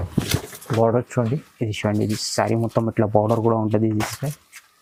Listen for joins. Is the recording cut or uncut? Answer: uncut